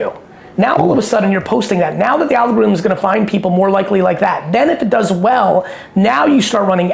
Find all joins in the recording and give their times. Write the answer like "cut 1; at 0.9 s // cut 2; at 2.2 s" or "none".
none